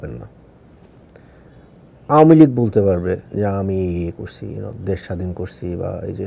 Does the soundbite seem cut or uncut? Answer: cut